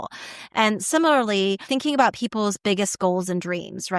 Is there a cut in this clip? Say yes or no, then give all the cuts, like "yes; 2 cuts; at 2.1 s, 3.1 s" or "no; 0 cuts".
yes; 1 cut; at 1.7 s